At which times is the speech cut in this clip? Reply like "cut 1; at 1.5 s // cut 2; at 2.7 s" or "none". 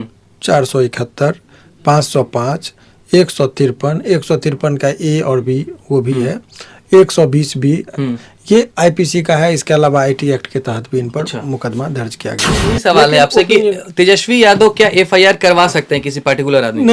cut 1; at 12.6 s